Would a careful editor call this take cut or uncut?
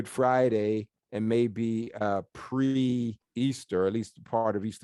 cut